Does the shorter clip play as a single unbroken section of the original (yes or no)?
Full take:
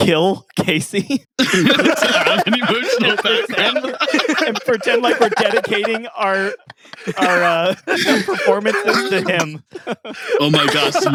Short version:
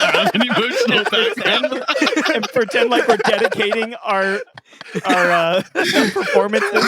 yes